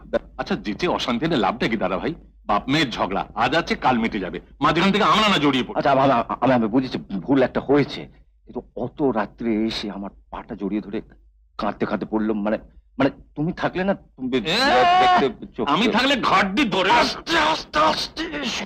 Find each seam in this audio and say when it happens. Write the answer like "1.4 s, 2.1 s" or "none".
none